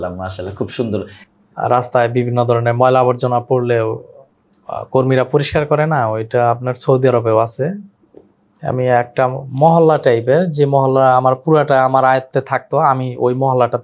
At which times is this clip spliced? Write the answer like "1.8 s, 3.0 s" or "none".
1.2 s